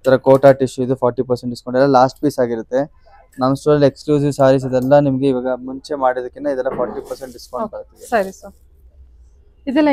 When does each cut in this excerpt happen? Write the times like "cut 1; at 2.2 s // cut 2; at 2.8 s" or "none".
none